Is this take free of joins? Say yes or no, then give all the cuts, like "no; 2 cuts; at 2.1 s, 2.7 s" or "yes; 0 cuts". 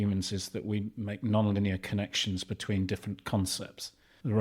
yes; 0 cuts